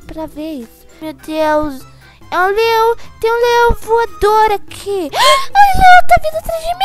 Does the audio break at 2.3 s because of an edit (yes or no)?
no